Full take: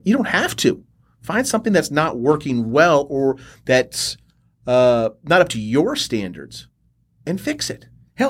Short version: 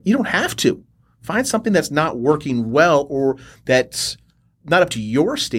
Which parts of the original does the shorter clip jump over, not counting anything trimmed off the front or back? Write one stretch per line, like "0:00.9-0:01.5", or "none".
0:04.6-0:05.2